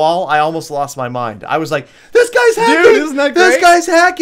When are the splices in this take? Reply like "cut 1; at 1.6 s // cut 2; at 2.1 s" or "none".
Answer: none